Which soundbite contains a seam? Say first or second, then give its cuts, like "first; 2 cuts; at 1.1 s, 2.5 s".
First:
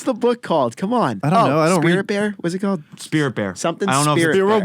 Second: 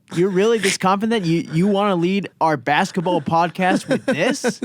first; 1 cut; at 1.2 s